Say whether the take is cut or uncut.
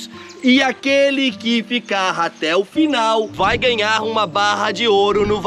uncut